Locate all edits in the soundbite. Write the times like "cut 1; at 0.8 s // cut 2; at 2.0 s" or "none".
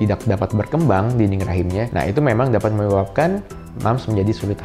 none